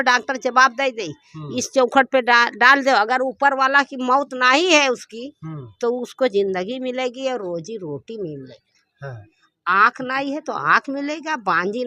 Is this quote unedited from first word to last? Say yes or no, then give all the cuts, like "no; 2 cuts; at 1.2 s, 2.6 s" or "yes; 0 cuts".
yes; 0 cuts